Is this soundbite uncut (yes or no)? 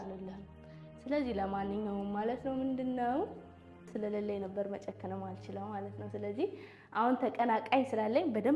no